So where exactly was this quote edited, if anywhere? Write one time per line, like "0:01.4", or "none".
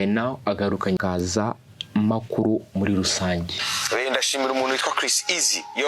0:01.0